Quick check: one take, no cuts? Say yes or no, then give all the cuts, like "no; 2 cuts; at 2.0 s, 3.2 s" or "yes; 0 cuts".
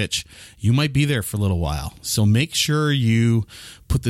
yes; 0 cuts